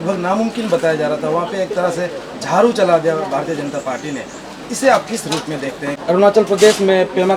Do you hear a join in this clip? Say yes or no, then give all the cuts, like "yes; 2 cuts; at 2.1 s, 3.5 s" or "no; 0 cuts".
yes; 1 cut; at 5.9 s